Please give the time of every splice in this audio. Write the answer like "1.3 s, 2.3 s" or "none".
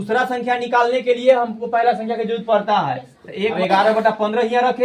3.6 s